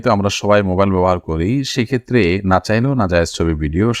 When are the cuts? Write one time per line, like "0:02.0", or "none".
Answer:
none